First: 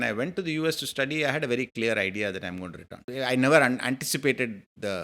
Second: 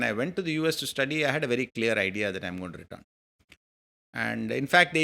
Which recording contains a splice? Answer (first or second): first